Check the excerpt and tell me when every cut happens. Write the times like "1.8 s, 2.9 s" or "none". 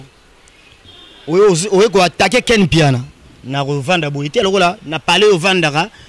none